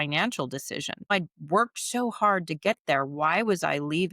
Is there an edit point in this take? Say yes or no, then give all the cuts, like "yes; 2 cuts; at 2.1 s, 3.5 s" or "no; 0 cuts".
yes; 1 cut; at 1.1 s